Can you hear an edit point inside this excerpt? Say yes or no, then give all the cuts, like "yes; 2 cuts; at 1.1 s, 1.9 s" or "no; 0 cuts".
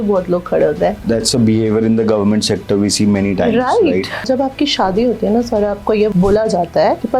yes; 2 cuts; at 1.0 s, 4.2 s